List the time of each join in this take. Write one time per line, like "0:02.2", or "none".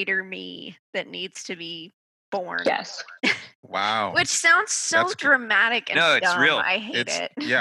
none